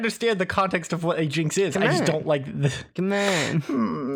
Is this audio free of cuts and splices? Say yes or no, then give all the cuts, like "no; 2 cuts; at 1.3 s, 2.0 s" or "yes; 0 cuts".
yes; 0 cuts